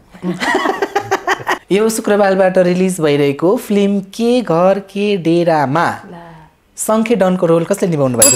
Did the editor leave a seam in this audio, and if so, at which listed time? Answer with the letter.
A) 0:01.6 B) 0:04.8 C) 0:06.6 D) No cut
A